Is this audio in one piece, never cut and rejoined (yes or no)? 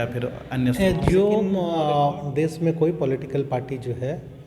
no